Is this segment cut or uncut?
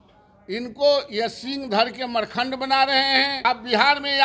cut